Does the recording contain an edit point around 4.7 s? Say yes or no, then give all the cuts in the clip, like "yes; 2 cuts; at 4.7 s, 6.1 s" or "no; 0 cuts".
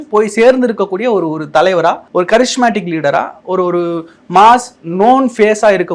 no; 1 cut; at 2.0 s